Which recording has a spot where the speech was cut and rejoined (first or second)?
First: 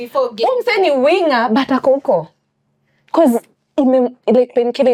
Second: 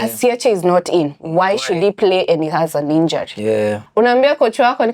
second